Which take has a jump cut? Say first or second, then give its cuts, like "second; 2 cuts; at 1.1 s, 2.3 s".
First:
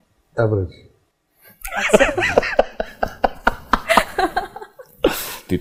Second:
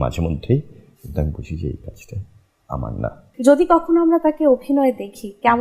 second; 1 cut; at 3.2 s